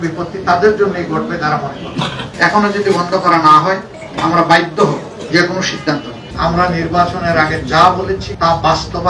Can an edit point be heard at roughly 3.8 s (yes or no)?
no